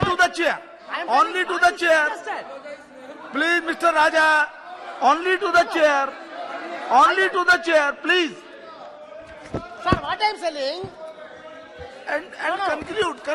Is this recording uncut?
yes; 0 cuts

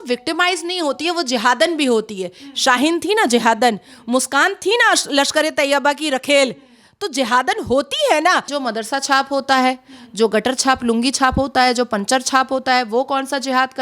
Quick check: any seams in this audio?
yes; 1 cut; at 8.5 s

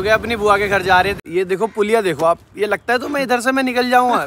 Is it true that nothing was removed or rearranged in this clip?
no; 1 cut; at 1.2 s

